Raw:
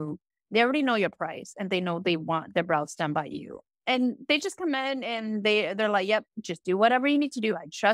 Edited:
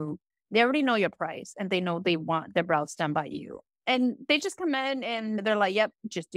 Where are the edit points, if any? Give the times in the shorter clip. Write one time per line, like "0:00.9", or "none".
0:05.4